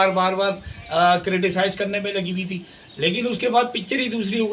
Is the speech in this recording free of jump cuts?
yes; 0 cuts

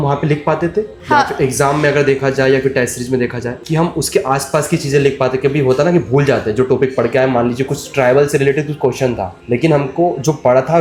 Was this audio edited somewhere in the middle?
no; 0 cuts

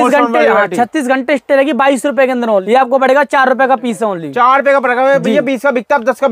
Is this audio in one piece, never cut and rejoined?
no; 1 cut; at 2.6 s

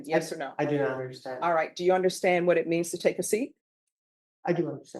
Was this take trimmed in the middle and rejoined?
no; 0 cuts

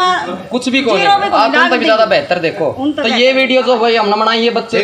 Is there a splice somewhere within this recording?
no; 0 cuts

